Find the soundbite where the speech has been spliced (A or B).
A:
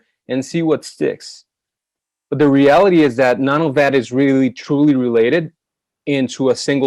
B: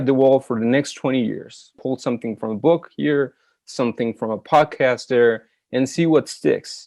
B